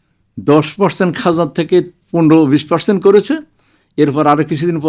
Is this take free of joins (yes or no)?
no